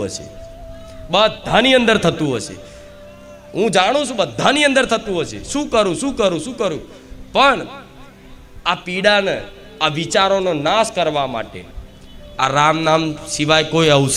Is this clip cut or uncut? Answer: uncut